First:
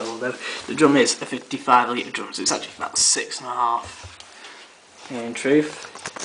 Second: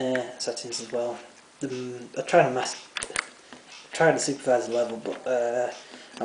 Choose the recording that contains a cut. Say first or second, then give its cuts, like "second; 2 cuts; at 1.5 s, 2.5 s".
second; 1 cut; at 4.4 s